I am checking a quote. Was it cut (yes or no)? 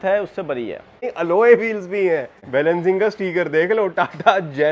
yes